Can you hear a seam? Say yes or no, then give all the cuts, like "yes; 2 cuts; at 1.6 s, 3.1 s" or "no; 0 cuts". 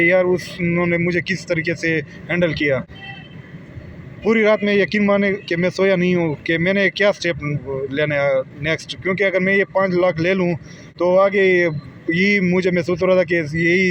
no; 0 cuts